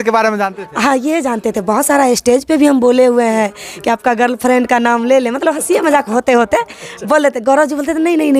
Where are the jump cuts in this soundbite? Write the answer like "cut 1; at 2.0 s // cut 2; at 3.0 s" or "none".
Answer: none